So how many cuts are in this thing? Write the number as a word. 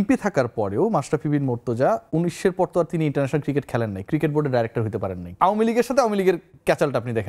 one